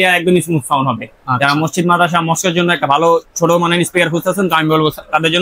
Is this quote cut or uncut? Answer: uncut